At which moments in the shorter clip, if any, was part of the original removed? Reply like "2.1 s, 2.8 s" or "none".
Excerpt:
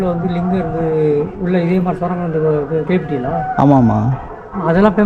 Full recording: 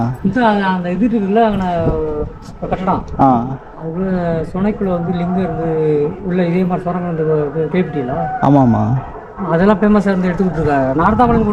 none